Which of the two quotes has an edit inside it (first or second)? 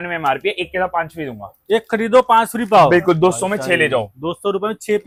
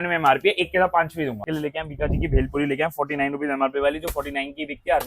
second